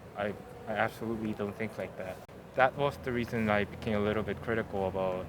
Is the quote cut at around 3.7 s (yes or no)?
no